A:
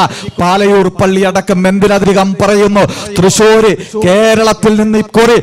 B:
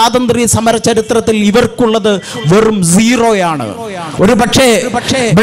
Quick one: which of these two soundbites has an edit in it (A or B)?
A